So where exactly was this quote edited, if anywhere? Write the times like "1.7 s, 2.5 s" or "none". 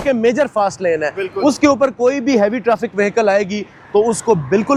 none